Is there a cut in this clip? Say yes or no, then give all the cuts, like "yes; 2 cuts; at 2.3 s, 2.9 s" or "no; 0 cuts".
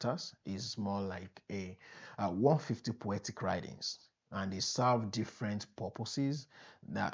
no; 0 cuts